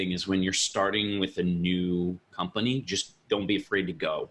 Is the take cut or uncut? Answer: uncut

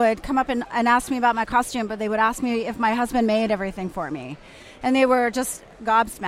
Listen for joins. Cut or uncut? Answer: uncut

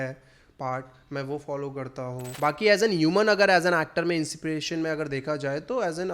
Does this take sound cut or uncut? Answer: cut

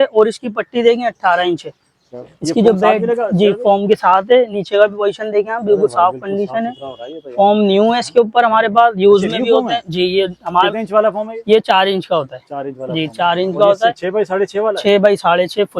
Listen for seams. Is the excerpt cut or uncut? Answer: uncut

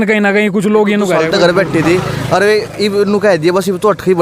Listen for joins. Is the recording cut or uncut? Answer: cut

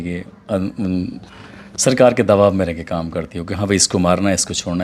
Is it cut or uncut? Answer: uncut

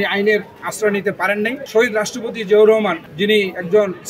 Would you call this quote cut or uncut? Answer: cut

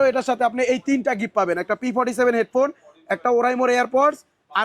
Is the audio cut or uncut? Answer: uncut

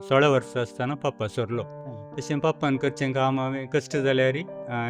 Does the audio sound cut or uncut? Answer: uncut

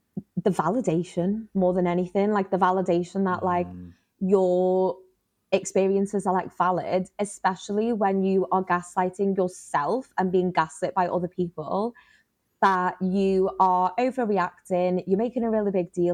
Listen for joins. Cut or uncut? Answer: uncut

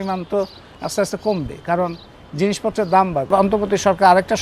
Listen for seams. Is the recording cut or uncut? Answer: cut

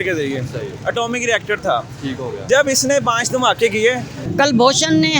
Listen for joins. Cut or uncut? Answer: cut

